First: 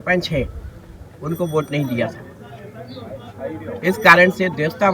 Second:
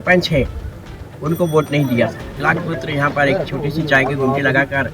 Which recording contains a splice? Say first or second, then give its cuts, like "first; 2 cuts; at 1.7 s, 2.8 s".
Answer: second; 1 cut; at 2.4 s